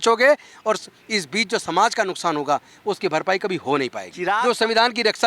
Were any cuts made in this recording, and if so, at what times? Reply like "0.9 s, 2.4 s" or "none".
4.3 s

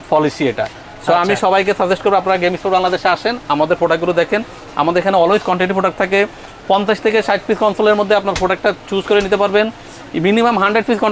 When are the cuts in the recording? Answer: none

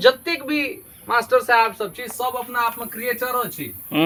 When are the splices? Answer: none

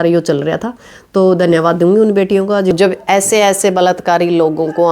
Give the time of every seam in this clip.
2.7 s

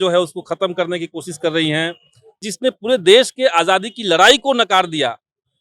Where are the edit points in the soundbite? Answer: 2.4 s

